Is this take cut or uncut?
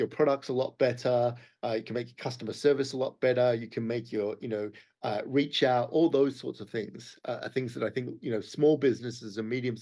uncut